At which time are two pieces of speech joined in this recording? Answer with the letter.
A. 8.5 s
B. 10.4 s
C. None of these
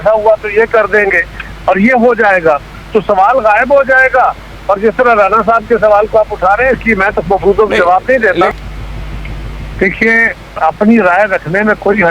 A